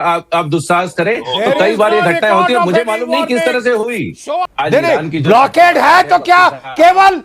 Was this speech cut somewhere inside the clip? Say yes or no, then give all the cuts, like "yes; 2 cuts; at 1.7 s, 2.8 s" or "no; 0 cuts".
yes; 1 cut; at 4.4 s